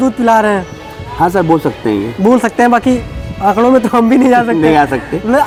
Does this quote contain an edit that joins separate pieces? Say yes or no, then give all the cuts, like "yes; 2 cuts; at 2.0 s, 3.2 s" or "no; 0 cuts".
no; 0 cuts